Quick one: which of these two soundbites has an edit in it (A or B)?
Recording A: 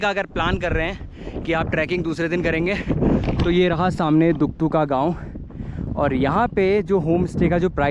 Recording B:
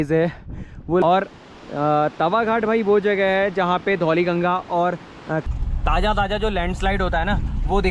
B